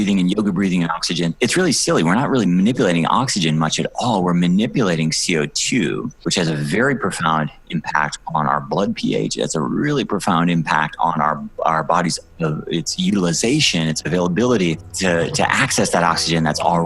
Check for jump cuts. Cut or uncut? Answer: uncut